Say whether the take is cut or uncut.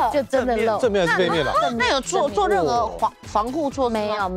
uncut